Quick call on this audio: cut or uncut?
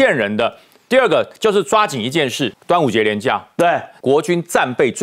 cut